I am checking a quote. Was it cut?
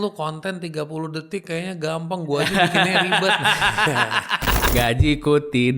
yes; 1 cut; at 4.6 s

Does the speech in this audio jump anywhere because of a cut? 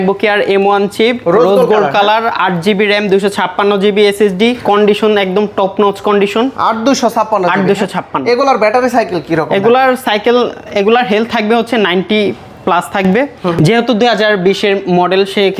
no; 0 cuts

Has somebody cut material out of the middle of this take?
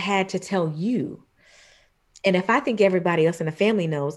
no; 0 cuts

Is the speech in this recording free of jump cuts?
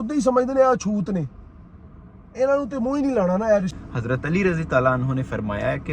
no; 1 cut; at 3.8 s

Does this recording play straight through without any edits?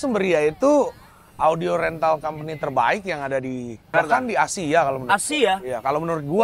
yes; 0 cuts

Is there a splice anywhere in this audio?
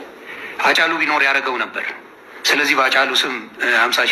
yes; 1 cut; at 2.3 s

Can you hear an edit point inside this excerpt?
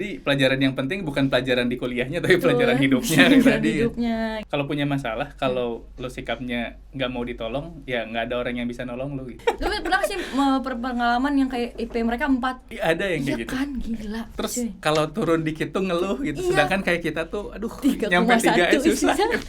yes; 4 cuts; at 4.4 s, 9.4 s, 12.7 s, 14.3 s

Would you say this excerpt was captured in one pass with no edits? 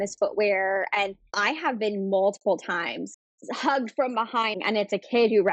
no; 2 cuts; at 1.3 s, 4.6 s

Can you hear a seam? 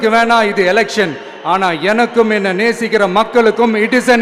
no; 0 cuts

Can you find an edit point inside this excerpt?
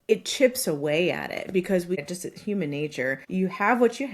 yes; 2 cuts; at 2.0 s, 3.2 s

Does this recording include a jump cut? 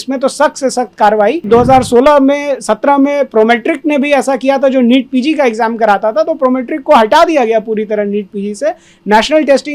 yes; 1 cut; at 1.4 s

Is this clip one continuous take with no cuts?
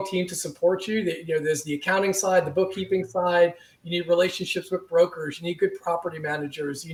yes; 0 cuts

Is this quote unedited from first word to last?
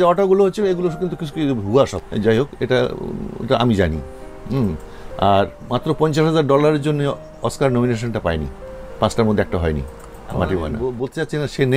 no; 1 cut; at 10.7 s

